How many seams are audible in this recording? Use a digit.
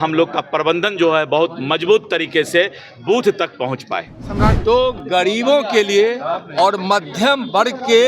1